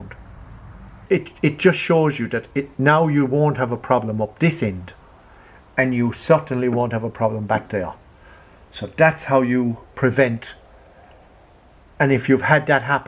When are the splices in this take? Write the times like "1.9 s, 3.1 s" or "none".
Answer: 1.0 s